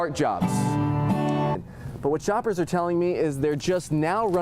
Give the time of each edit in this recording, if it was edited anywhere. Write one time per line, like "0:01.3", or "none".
0:01.6